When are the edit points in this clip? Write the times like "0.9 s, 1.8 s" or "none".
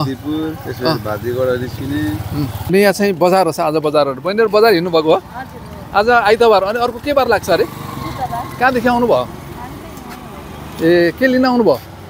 2.6 s